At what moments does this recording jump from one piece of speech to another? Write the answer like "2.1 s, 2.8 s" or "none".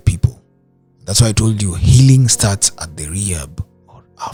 none